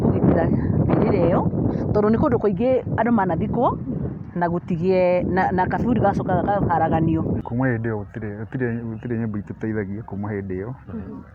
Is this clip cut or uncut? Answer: cut